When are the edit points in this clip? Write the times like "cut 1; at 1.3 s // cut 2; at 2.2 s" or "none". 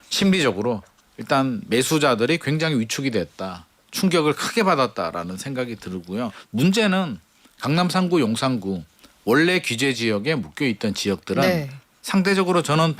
cut 1; at 6.4 s